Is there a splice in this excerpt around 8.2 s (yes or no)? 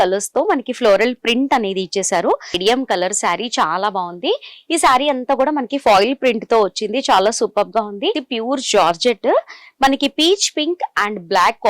yes